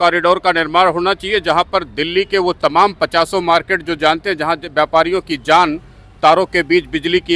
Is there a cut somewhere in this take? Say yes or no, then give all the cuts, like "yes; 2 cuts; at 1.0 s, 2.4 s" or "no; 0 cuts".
no; 0 cuts